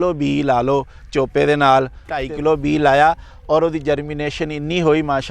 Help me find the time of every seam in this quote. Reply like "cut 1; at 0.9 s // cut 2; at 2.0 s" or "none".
cut 1; at 2.3 s